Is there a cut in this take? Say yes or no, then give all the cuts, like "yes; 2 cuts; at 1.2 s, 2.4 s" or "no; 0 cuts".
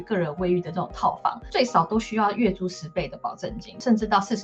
no; 0 cuts